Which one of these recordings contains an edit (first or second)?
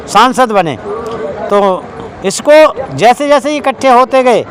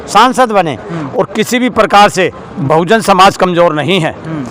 second